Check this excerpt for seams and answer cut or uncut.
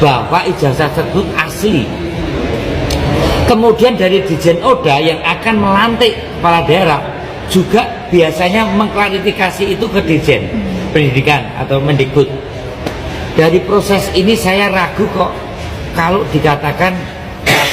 uncut